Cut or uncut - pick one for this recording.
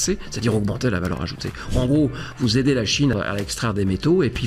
cut